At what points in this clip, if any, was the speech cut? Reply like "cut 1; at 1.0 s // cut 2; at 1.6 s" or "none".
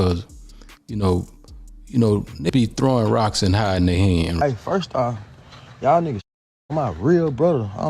cut 1; at 2.5 s // cut 2; at 4.3 s